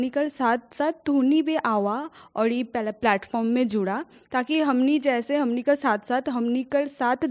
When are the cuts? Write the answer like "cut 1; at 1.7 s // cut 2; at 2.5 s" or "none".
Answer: none